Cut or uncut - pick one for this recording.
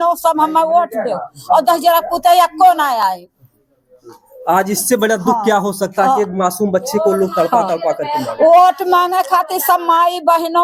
uncut